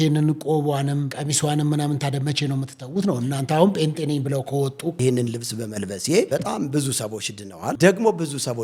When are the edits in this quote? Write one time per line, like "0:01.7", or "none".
0:01.1
0:05.0
0:06.3
0:07.8